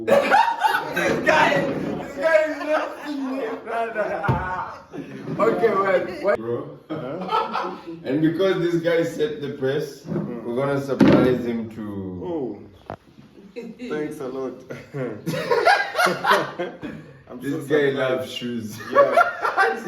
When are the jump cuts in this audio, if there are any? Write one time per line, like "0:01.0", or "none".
0:06.4